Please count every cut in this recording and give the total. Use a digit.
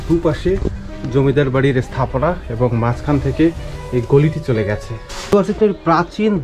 1